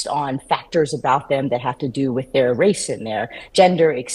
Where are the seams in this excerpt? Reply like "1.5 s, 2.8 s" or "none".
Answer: none